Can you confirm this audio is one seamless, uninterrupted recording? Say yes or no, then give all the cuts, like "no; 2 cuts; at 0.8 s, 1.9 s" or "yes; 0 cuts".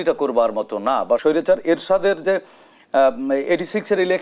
no; 1 cut; at 1.2 s